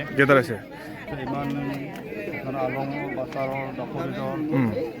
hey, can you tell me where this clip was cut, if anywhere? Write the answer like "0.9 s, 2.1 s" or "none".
1.0 s